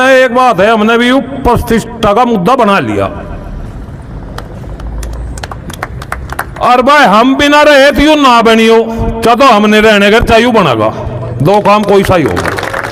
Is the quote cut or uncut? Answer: uncut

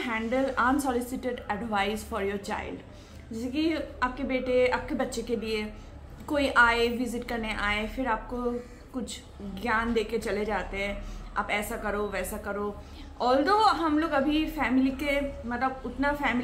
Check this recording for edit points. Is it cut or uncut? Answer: uncut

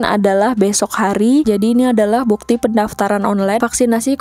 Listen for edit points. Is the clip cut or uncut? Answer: cut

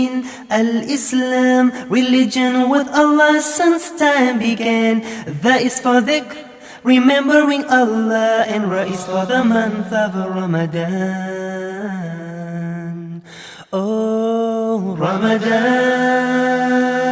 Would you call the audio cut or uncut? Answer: uncut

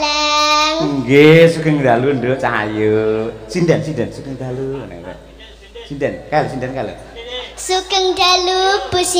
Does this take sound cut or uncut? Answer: uncut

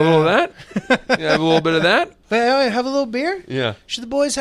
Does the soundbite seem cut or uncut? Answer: cut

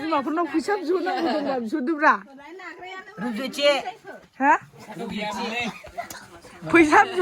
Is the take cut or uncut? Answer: uncut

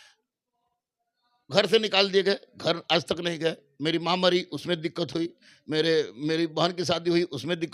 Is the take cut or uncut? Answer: uncut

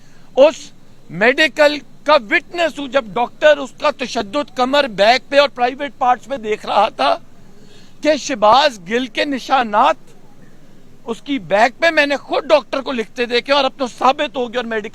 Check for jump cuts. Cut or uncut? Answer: uncut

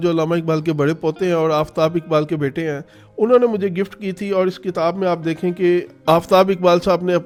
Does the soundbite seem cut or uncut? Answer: uncut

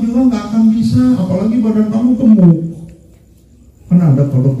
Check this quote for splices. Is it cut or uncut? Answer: uncut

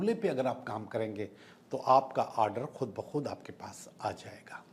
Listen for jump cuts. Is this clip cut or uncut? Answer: uncut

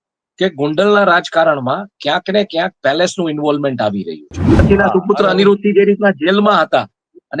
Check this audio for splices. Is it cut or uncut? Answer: cut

